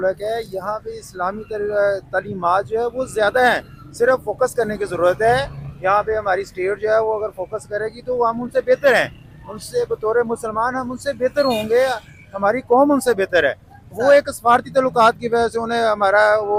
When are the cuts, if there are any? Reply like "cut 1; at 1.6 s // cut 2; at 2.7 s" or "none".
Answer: none

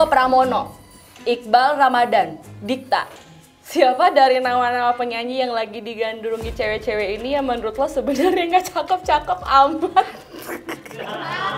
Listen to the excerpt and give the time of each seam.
none

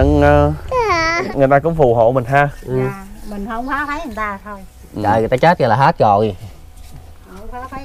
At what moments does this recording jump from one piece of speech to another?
cut 1; at 1.3 s

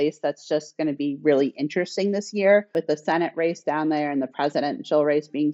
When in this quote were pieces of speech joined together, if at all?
cut 1; at 2.7 s

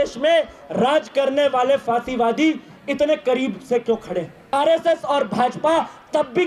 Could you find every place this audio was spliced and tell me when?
cut 1; at 4.4 s

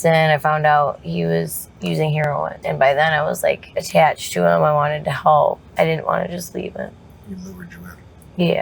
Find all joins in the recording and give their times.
cut 1; at 2.2 s // cut 2; at 3.7 s // cut 3; at 5.6 s // cut 4; at 7.1 s

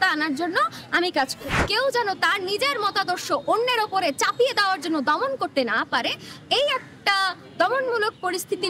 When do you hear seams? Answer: cut 1; at 1.7 s

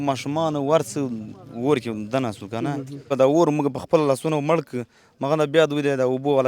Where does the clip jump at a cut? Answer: cut 1; at 3.1 s

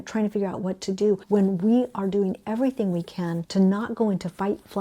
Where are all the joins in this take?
cut 1; at 1.2 s // cut 2; at 3.4 s

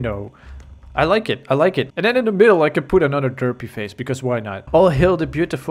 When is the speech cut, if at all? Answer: cut 1; at 4.6 s

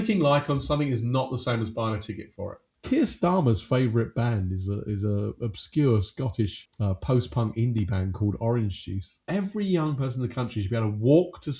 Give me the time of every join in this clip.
cut 1; at 2.6 s // cut 2; at 6.7 s // cut 3; at 9.2 s

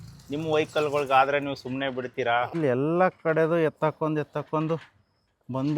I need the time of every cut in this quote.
cut 1; at 2.6 s

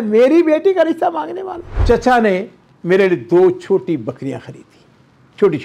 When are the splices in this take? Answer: cut 1; at 1.7 s

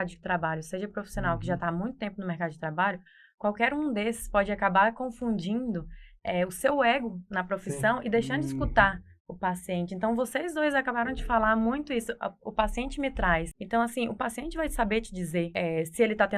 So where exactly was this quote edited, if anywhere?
cut 1; at 13.6 s // cut 2; at 15.5 s

